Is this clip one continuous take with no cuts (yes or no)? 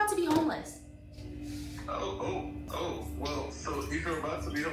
no